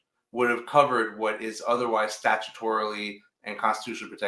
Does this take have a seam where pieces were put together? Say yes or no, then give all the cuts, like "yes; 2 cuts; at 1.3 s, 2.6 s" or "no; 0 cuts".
no; 0 cuts